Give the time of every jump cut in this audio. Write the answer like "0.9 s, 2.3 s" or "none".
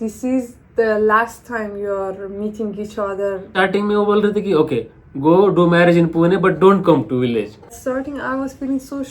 3.5 s, 7.8 s